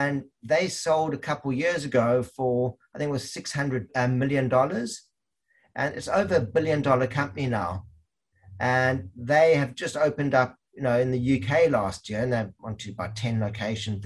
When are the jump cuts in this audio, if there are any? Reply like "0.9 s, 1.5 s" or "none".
3.9 s